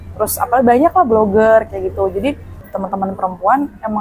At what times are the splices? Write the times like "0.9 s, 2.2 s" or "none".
2.7 s